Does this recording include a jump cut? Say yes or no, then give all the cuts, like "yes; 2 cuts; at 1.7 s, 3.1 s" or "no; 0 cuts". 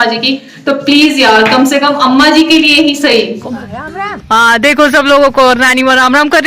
yes; 1 cut; at 3.4 s